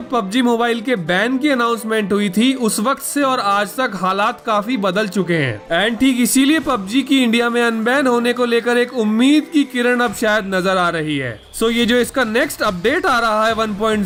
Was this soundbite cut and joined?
no; 0 cuts

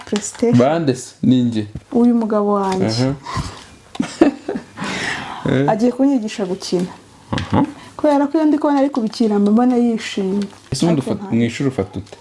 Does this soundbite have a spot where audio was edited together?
yes; 1 cut; at 10.6 s

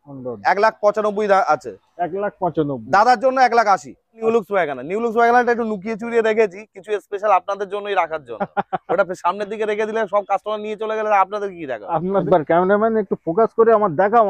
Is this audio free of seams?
no; 2 cuts; at 4.2 s, 12.2 s

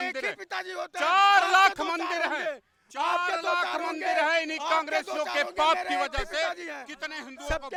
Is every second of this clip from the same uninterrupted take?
yes; 0 cuts

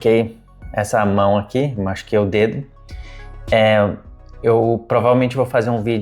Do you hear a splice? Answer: no; 0 cuts

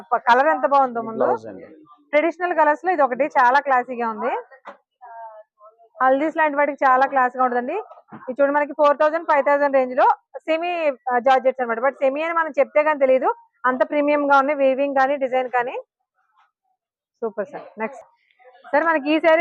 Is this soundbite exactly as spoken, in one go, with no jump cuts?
yes; 0 cuts

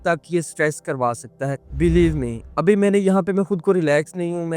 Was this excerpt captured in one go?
no; 1 cut; at 1.6 s

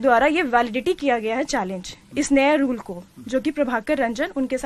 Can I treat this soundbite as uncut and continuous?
yes; 0 cuts

